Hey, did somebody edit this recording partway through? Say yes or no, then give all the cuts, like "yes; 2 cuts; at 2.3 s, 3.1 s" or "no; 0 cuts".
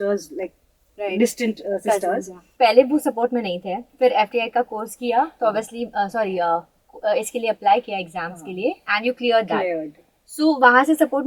yes; 1 cut; at 2.4 s